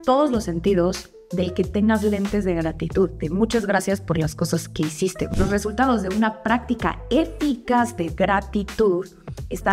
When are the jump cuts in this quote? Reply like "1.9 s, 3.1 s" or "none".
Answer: 5.3 s